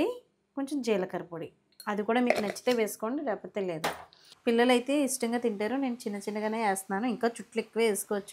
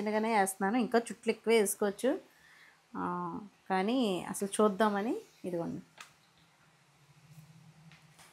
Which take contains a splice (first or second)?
first